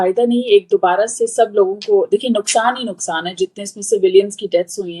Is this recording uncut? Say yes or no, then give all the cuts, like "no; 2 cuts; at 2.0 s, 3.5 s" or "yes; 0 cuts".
yes; 0 cuts